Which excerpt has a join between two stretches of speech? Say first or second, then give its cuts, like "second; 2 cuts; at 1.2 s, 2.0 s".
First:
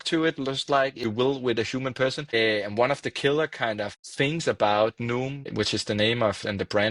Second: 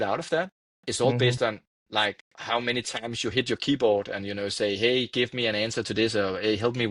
first; 4 cuts; at 1.0 s, 2.3 s, 4.0 s, 5.5 s